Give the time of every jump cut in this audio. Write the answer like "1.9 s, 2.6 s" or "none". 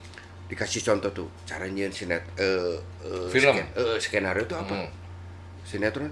none